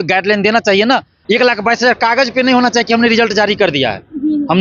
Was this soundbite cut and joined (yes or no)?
yes